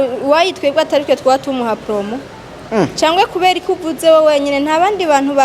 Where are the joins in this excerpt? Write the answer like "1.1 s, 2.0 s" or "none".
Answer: none